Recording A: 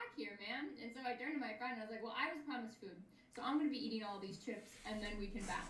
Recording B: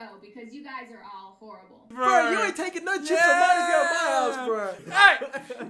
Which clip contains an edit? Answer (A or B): B